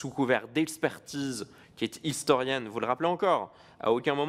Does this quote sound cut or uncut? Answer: uncut